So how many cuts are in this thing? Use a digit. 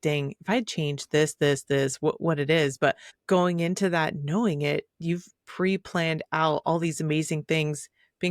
1